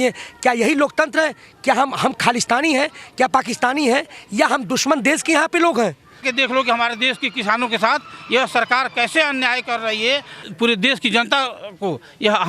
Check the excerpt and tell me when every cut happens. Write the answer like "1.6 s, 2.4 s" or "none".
6.2 s, 10.4 s